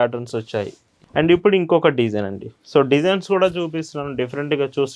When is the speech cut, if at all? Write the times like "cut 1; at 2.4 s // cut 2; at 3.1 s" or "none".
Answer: cut 1; at 1.0 s